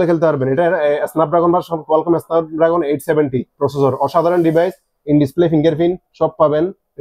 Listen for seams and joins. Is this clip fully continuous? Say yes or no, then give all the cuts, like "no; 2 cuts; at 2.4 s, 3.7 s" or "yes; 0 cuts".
yes; 0 cuts